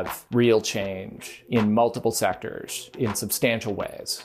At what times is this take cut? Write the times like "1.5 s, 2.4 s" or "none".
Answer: 2.9 s